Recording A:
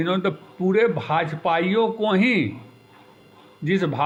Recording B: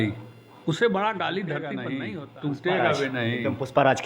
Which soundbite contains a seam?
B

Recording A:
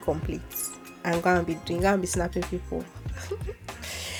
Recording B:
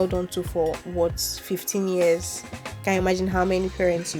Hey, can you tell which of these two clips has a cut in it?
B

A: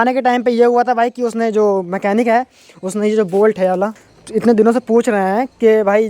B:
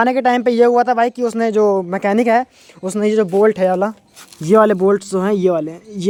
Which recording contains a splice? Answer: A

